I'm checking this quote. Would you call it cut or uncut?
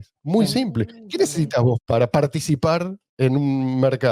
uncut